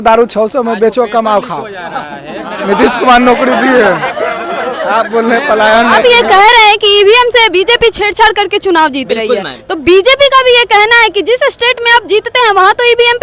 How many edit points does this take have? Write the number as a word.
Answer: one